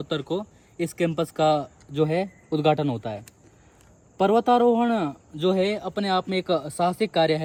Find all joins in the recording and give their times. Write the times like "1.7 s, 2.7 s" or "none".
none